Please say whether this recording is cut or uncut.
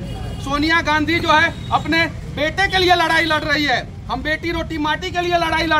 uncut